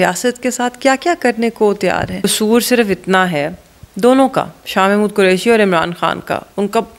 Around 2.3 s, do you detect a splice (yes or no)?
yes